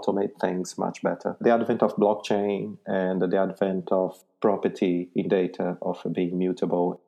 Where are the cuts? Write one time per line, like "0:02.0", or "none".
0:01.3